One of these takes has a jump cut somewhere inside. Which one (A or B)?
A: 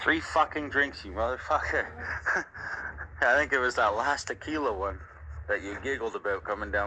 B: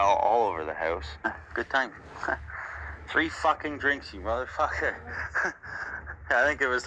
B